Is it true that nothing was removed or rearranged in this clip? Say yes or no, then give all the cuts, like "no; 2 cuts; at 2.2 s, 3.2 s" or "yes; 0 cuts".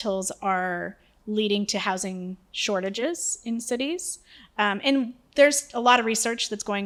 yes; 0 cuts